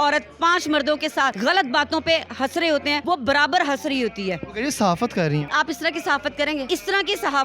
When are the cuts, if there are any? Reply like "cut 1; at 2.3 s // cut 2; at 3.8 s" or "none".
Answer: cut 1; at 1.4 s // cut 2; at 3.0 s // cut 3; at 5.5 s // cut 4; at 6.7 s